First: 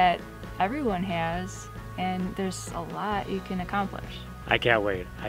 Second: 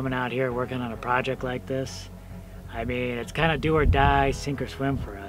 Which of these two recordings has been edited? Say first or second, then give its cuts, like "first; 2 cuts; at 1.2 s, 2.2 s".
first; 1 cut; at 4.3 s